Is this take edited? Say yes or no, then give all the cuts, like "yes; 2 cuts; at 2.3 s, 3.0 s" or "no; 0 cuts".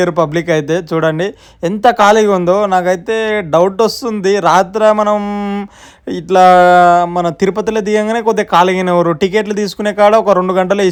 no; 0 cuts